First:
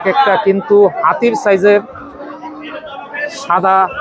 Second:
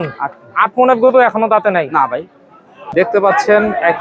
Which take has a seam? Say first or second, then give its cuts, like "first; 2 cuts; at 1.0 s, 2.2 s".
second; 1 cut; at 2.8 s